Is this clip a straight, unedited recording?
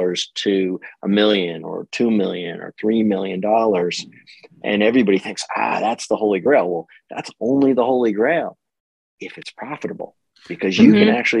yes; 0 cuts

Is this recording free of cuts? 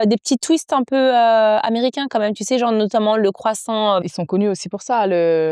no; 1 cut; at 4.0 s

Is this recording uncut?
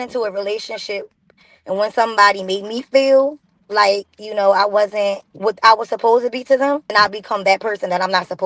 no; 2 cuts; at 5.3 s, 6.9 s

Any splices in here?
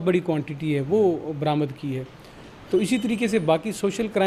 no; 0 cuts

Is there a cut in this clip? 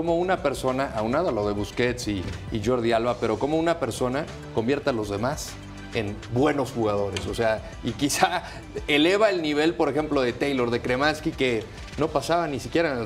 no; 0 cuts

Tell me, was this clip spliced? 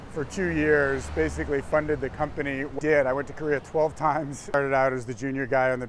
yes; 2 cuts; at 2.7 s, 4.5 s

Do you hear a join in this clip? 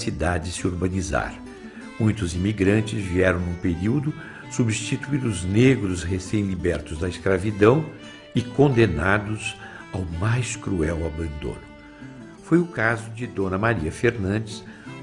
no; 0 cuts

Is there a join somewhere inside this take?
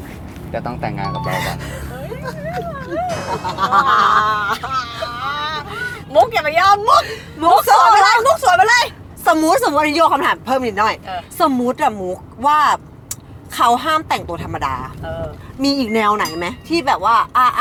no; 0 cuts

